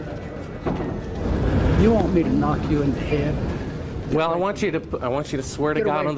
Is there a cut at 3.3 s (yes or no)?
no